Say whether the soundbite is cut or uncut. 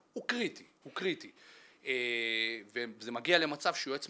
uncut